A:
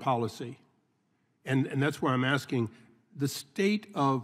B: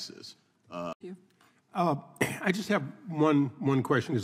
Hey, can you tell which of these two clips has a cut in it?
B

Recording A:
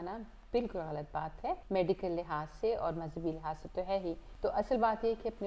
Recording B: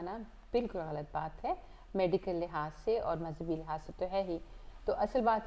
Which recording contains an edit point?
A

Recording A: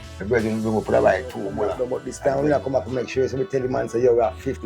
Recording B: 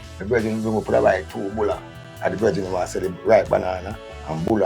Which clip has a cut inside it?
A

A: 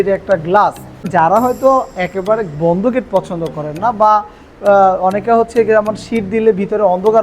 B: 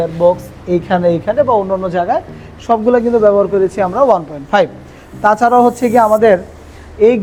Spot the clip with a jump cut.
A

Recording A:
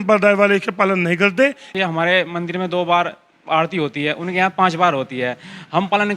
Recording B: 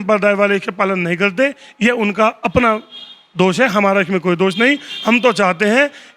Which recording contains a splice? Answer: A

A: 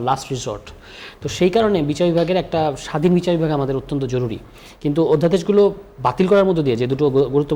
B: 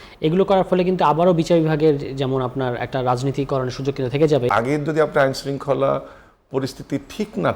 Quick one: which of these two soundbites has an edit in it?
B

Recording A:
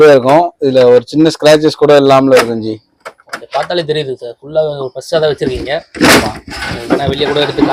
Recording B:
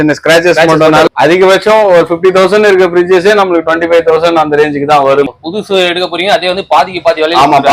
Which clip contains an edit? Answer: B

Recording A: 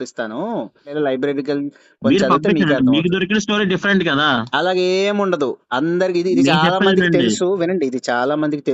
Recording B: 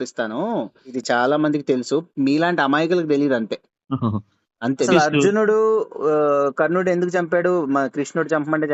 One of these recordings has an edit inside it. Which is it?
B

